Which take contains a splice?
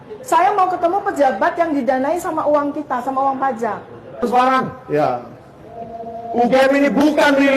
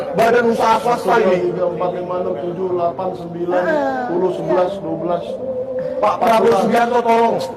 first; 1 cut; at 4.1 s

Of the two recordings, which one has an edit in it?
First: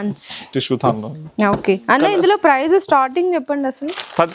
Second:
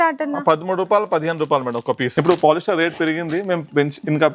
second; 1 cut; at 2.1 s

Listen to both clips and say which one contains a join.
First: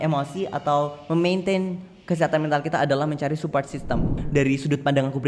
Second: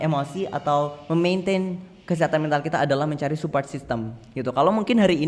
first; 1 cut; at 4.2 s

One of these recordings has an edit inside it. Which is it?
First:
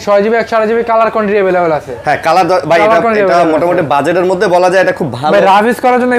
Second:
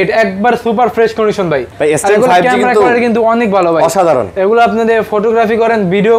second; 1 cut; at 1.7 s

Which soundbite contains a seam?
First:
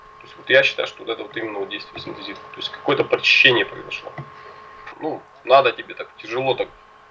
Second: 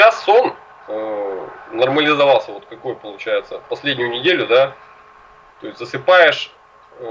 first; 1 cut; at 4.9 s

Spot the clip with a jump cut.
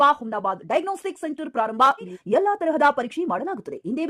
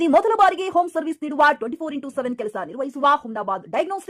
first; 1 cut; at 2.2 s

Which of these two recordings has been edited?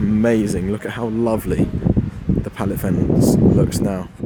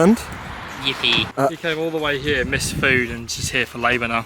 second; 1 cut; at 1.3 s

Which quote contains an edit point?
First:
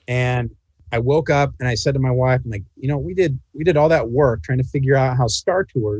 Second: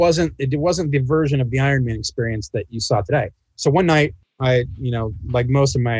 second; 1 cut; at 4.2 s

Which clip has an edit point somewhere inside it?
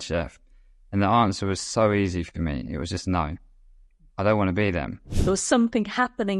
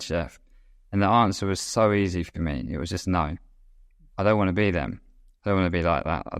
first; 1 cut; at 5.1 s

